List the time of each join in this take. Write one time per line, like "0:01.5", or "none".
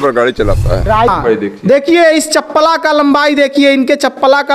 0:01.1